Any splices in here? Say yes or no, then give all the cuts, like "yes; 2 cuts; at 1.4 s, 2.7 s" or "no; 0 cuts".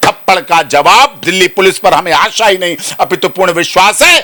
no; 0 cuts